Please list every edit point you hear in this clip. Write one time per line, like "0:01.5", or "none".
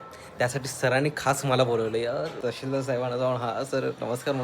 0:02.3